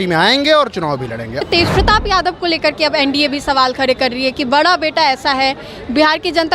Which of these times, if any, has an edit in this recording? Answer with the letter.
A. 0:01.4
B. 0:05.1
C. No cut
A